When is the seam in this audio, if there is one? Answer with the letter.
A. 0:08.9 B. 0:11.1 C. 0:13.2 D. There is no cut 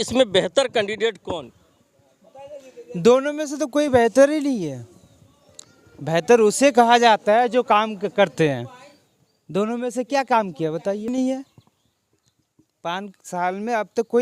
B